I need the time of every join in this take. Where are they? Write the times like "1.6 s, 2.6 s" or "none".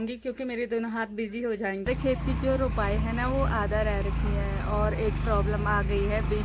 1.8 s